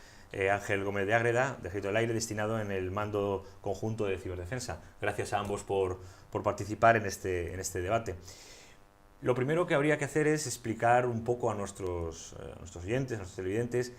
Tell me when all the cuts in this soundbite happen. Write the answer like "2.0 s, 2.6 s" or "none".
4.6 s

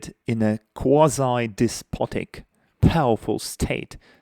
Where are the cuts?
none

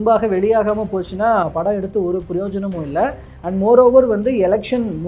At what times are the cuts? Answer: none

